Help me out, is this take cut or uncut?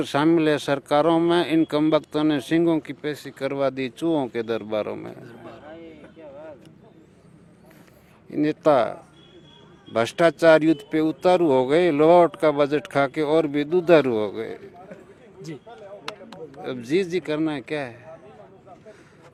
uncut